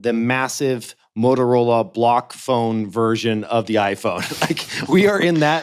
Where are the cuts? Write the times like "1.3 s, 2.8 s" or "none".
none